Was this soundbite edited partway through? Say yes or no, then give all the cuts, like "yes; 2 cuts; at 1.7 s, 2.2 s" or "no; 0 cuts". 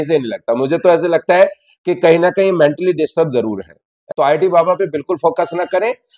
yes; 1 cut; at 3.9 s